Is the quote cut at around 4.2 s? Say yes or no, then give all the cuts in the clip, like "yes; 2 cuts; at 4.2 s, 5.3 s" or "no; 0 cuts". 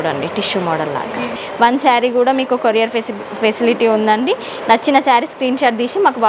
no; 1 cut; at 1.4 s